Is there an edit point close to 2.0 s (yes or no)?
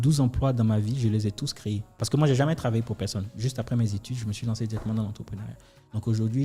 yes